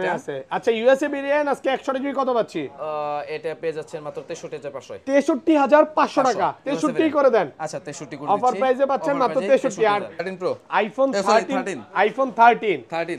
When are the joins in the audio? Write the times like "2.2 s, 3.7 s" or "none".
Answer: 10.2 s